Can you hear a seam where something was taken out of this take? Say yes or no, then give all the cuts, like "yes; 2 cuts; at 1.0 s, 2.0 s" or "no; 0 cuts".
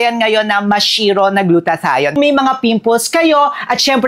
yes; 1 cut; at 2.2 s